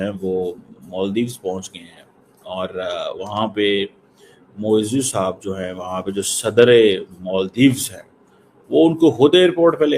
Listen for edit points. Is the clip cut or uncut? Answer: uncut